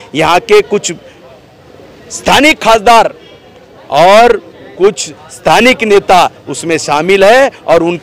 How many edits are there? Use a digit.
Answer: 0